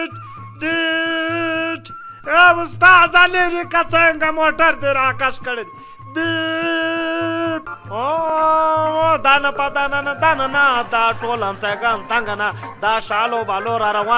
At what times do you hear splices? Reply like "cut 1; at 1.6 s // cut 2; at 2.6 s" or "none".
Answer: cut 1; at 8.3 s